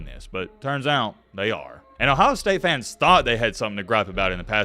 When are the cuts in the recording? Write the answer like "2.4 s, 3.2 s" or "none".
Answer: 1.8 s